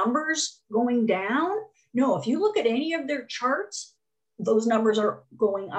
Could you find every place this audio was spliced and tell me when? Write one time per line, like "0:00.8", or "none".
none